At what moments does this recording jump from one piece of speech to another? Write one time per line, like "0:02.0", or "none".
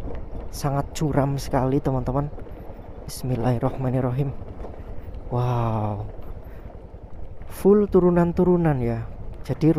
none